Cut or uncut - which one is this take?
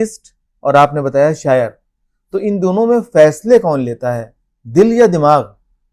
uncut